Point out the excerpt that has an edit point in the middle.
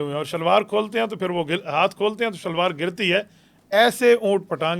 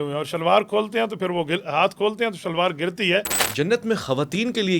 second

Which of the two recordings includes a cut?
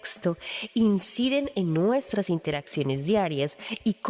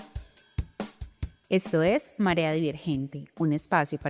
second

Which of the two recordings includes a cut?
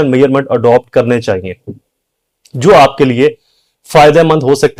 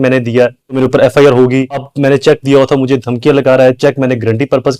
second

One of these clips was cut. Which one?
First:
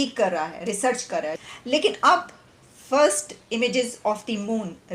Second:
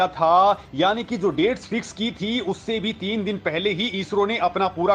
first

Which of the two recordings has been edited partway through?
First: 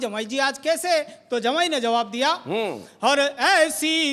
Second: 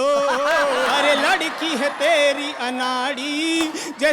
second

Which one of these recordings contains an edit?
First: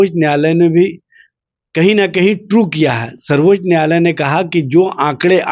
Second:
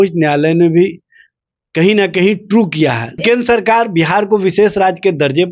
second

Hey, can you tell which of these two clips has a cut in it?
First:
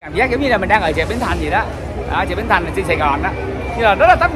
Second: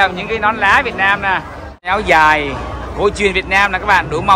second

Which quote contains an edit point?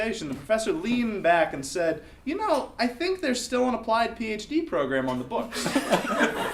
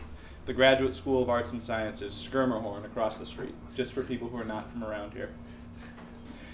second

